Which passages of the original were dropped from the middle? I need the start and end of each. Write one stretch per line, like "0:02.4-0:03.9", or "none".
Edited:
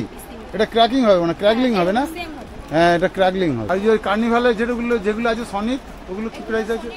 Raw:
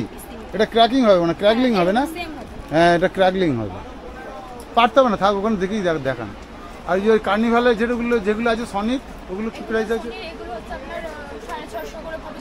0:03.6-0:06.8

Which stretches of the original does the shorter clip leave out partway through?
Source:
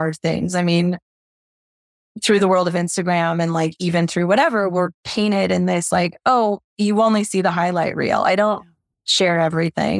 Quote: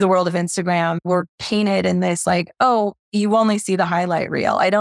0:03.4-0:04.7

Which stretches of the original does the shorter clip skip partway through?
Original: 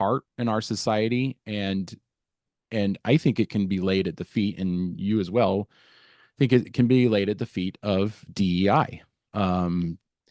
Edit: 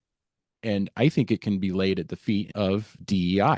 0:04.6-0:07.8

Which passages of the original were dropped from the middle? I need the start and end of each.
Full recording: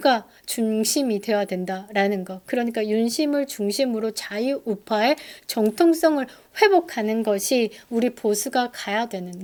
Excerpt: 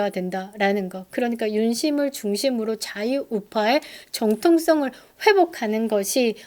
none

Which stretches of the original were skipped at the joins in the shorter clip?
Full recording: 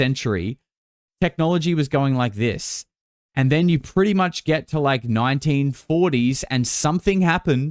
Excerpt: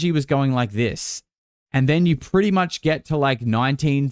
none

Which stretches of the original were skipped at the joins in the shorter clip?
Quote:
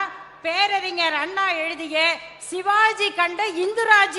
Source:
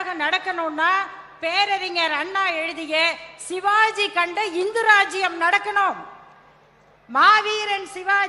none

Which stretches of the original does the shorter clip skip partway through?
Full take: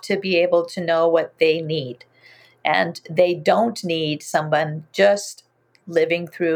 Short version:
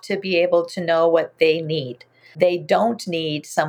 0:02.2-0:03.0

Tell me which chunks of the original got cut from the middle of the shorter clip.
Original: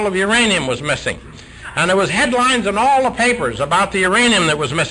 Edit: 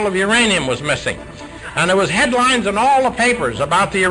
none

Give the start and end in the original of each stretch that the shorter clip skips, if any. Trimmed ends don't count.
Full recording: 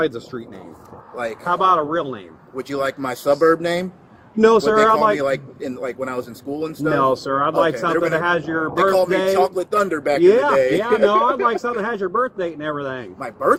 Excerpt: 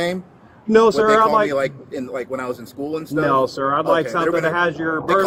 none

